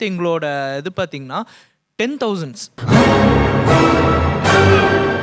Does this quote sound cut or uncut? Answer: uncut